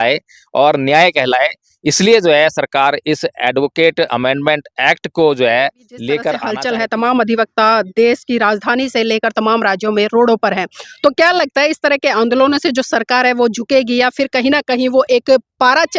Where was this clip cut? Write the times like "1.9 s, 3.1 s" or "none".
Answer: 6.5 s